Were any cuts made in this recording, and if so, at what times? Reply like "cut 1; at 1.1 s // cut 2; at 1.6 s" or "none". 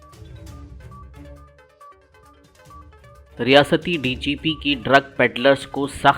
cut 1; at 1.3 s